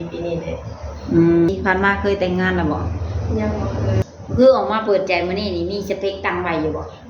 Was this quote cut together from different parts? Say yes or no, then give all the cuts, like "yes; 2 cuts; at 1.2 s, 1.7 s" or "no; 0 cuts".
yes; 2 cuts; at 1.5 s, 4.0 s